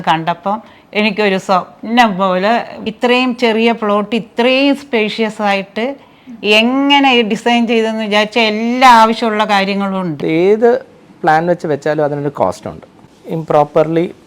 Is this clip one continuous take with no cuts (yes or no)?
no